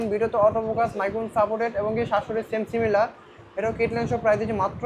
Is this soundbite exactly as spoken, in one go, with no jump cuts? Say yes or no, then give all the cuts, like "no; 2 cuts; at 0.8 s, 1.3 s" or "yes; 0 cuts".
yes; 0 cuts